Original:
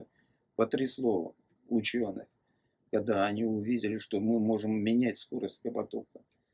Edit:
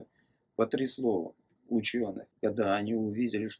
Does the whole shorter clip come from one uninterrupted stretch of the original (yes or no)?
no